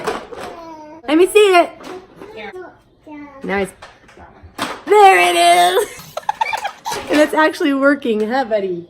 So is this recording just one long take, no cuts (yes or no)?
no